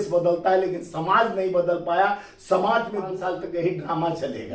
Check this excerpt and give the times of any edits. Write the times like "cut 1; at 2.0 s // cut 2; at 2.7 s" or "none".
cut 1; at 3.1 s

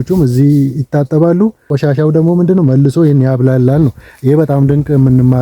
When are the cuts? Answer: cut 1; at 1.7 s

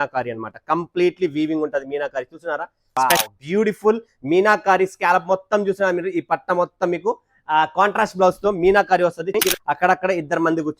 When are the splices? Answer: cut 1; at 2.8 s // cut 2; at 9.5 s

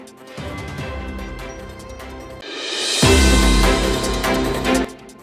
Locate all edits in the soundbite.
cut 1; at 1.9 s

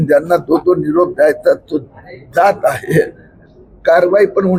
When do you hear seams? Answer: none

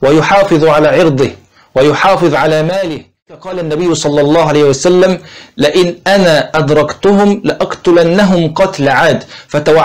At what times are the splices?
cut 1; at 3.3 s

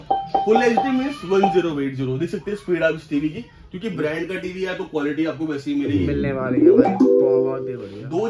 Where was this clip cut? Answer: none

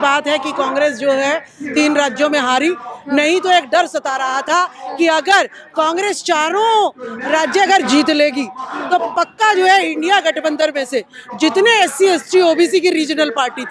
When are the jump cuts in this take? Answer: none

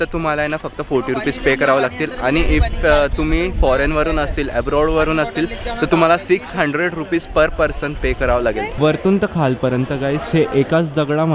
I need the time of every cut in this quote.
cut 1; at 8.7 s

